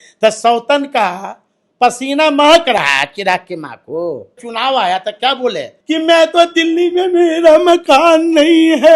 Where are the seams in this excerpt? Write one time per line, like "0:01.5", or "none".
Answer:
0:04.5
0:05.7